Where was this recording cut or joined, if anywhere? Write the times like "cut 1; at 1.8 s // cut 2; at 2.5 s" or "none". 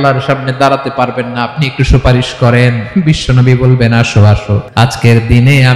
cut 1; at 4.6 s

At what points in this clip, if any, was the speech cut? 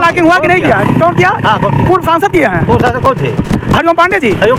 none

